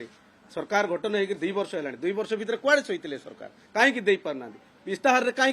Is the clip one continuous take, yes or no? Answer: yes